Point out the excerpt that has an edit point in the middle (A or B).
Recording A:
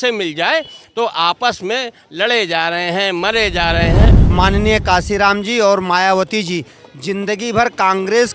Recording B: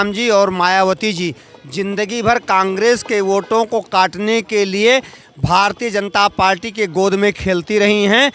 A